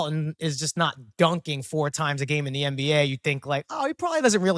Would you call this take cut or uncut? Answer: uncut